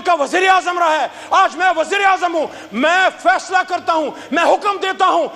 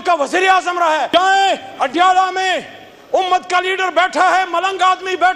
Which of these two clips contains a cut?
second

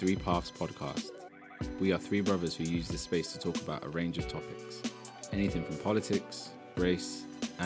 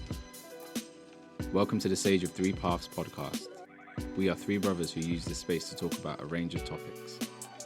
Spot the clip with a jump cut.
second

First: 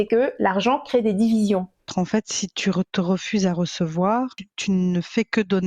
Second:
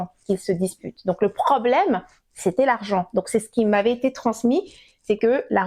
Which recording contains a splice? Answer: first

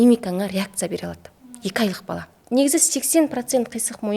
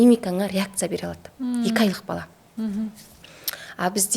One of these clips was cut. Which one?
first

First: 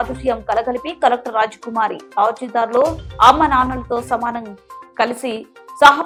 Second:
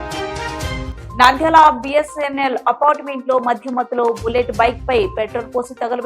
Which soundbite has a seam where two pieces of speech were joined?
second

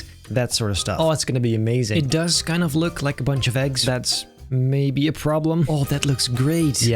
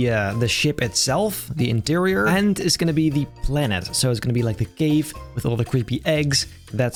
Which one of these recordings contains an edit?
first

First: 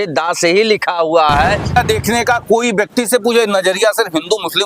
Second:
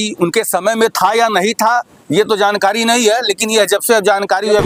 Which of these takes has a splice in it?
first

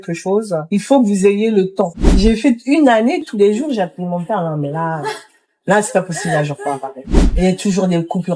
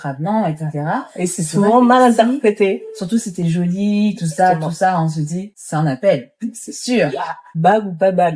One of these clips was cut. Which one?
first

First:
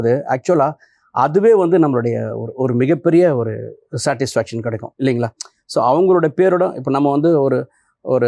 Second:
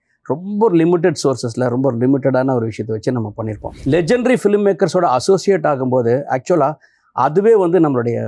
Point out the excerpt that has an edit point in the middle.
second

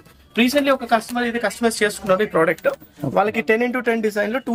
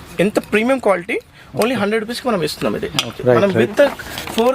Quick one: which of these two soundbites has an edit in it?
second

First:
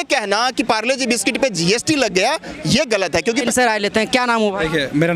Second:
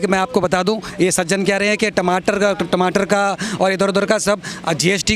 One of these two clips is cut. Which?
first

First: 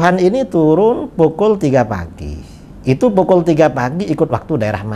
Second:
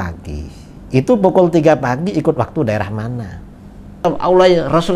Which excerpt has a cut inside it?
second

